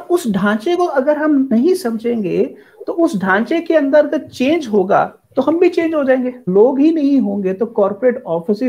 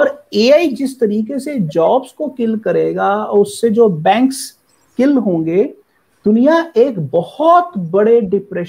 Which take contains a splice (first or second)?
first